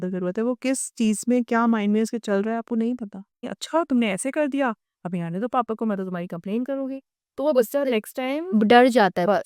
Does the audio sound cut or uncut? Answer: cut